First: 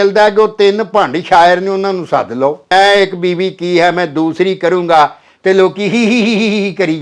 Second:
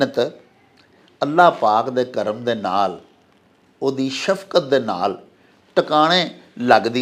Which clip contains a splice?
first; 1 cut; at 2.7 s

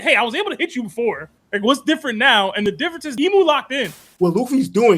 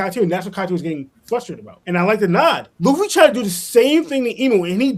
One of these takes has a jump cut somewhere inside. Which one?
first; 1 cut; at 4.0 s

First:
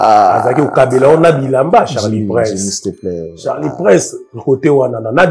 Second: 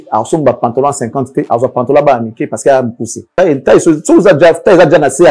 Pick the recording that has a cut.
second; 1 cut; at 3.2 s

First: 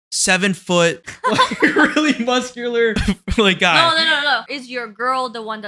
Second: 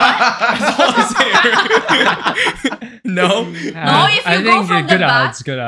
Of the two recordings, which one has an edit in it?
first; 3 cuts; at 1.1 s, 3.0 s, 4.6 s

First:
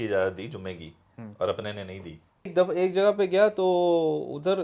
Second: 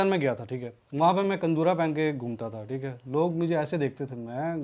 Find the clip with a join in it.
first; 1 cut; at 2.5 s

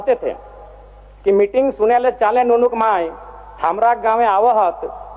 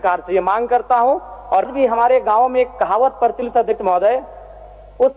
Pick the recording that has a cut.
second; 1 cut; at 1.7 s

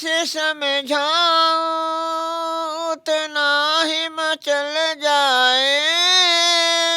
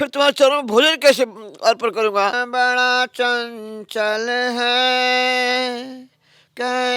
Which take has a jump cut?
second; 1 cut; at 2.3 s

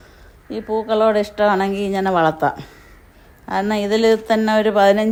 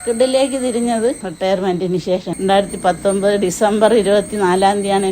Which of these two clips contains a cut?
second; 2 cuts; at 1.3 s, 2.3 s

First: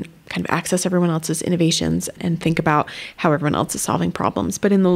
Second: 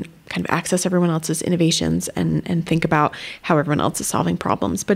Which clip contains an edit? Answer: first; 1 cut; at 2.2 s

